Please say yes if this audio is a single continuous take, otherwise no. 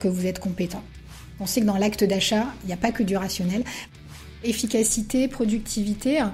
no